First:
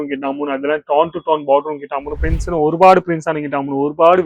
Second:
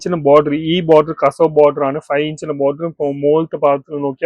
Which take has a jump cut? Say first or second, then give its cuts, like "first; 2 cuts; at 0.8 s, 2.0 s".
first; 1 cut; at 2.2 s